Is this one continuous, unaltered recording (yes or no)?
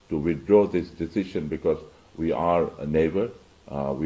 yes